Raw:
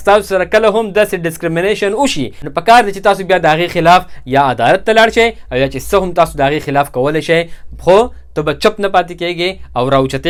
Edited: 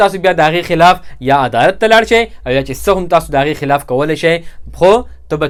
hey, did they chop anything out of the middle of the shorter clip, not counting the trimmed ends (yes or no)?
no